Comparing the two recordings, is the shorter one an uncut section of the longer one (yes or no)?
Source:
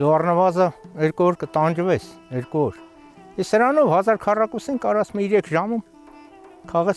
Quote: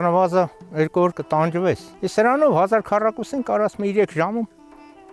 no